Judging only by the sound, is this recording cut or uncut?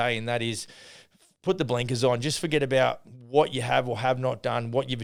uncut